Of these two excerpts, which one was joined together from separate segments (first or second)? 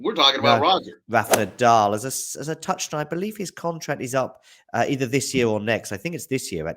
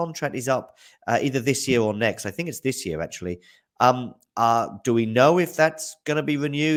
first